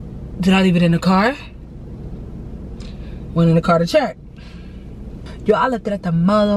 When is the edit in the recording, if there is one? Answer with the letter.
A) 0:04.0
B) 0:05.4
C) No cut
B